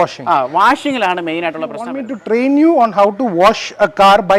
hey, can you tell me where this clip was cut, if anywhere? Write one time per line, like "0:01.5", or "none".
0:01.9